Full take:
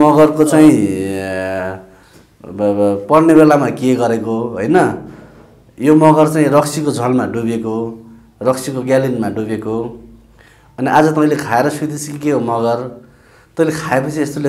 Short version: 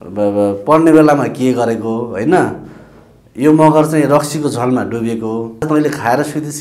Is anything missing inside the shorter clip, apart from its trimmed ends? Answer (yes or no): yes